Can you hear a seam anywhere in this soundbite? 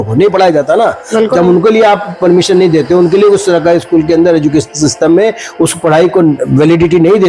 no; 0 cuts

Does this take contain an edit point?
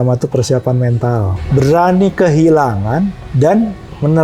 yes; 2 cuts; at 1.3 s, 3.2 s

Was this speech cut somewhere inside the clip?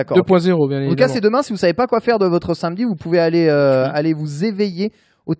no; 0 cuts

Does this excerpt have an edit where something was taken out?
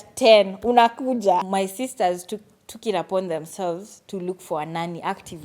yes; 1 cut; at 1.4 s

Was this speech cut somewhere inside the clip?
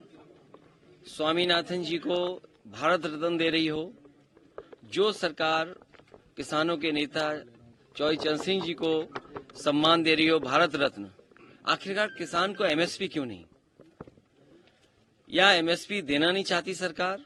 no; 0 cuts

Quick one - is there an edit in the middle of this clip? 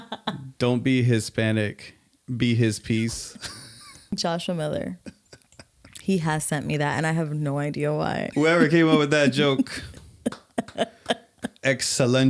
yes; 2 cuts; at 4.1 s, 8.3 s

